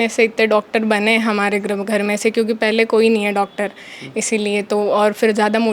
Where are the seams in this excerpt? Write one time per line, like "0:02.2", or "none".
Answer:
none